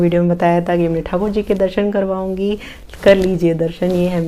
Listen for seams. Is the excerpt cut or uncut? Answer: uncut